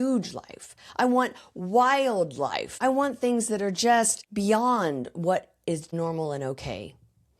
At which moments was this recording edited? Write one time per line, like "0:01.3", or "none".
0:02.8
0:04.2
0:05.9